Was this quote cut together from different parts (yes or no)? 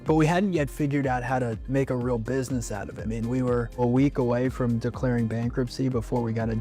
yes